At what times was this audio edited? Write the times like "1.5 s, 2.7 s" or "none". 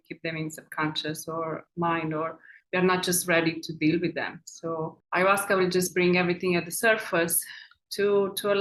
none